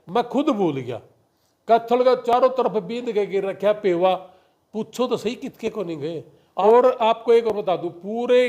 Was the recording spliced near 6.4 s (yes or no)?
yes